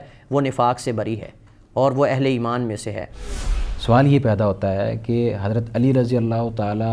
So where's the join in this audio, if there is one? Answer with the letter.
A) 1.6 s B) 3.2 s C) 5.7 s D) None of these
B